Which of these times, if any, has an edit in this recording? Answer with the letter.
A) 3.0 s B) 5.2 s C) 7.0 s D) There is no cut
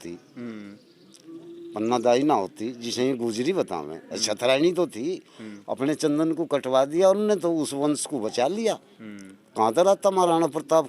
D